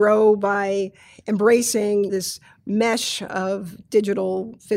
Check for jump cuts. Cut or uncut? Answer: uncut